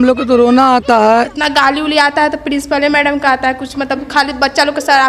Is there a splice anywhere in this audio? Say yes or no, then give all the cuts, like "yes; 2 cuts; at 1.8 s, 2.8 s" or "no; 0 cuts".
yes; 1 cut; at 1.3 s